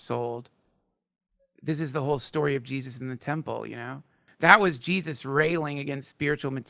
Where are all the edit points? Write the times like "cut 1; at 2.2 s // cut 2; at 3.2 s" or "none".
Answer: cut 1; at 4.2 s